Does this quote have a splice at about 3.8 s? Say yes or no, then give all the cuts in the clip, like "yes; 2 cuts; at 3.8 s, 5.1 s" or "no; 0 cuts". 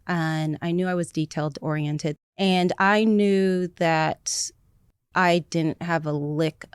no; 1 cut; at 2.3 s